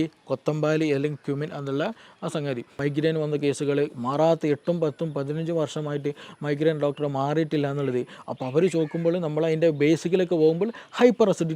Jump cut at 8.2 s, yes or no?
no